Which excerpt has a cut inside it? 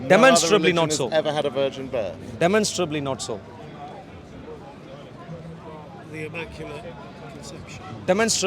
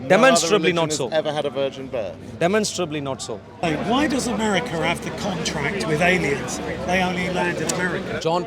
second; 1 cut; at 3.8 s

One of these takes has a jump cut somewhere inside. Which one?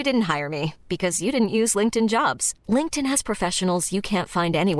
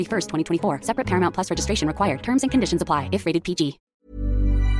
second; 1 cut; at 3.8 s

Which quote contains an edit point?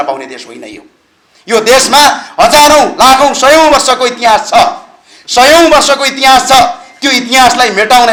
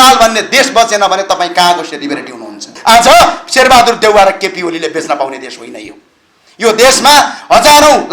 second; 1 cut; at 2.7 s

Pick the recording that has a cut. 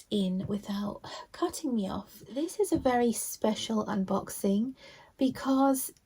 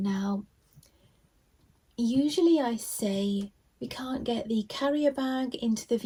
first; 1 cut; at 2.2 s

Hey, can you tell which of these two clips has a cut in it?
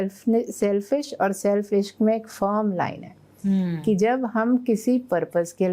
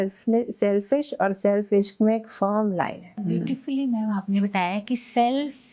second; 1 cut; at 3.2 s

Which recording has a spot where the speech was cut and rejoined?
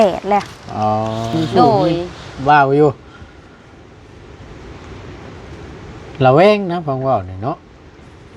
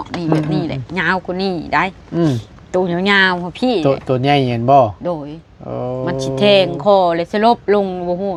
first; 1 cut; at 1.3 s

